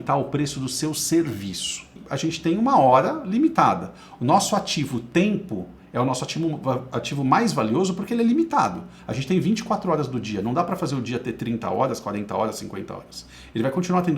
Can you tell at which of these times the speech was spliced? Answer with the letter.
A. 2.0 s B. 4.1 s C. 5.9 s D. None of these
A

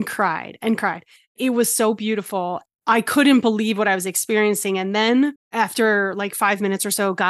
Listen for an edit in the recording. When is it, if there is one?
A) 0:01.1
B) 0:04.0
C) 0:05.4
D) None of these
C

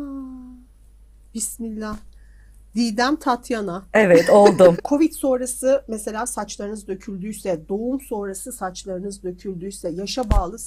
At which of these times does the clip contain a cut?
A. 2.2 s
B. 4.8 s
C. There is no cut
B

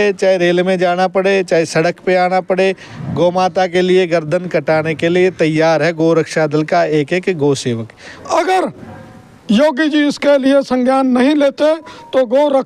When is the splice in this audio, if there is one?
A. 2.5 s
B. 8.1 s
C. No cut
B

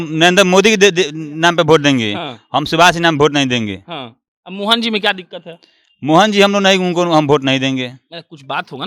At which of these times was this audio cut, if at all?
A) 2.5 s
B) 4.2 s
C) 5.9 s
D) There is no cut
D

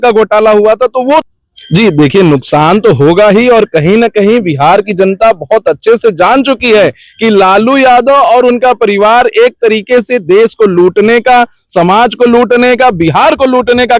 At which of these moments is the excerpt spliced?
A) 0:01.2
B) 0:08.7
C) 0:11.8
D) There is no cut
A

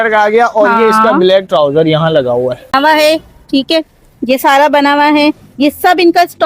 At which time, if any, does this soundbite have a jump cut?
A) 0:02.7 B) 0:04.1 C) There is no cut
A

